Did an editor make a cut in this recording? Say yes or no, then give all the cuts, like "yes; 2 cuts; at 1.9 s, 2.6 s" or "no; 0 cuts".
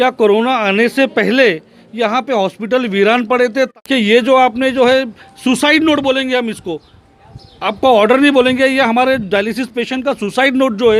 yes; 1 cut; at 3.7 s